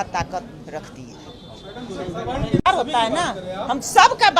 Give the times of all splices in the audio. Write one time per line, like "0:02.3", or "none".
none